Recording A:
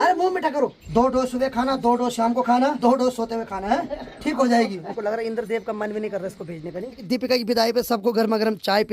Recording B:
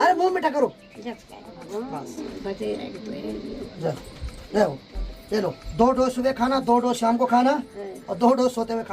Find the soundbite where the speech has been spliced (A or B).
A